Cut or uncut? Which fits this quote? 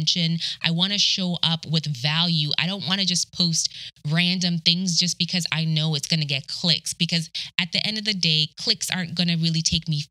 uncut